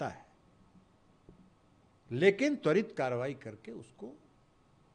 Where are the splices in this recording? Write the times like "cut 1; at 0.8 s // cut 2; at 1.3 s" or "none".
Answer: none